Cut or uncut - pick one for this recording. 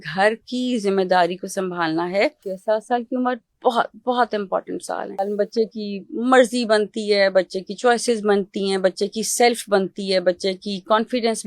cut